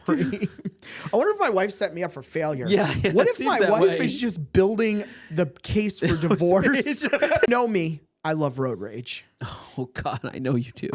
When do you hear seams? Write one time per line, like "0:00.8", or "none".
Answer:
0:07.5